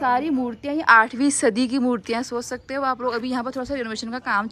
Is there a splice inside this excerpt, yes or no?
no